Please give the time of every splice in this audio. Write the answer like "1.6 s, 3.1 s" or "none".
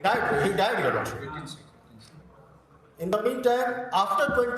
none